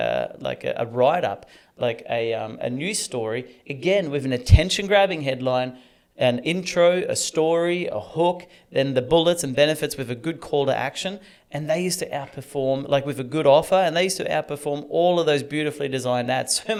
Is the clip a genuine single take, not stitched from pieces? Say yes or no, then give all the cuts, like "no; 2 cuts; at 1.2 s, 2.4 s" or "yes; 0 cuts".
yes; 0 cuts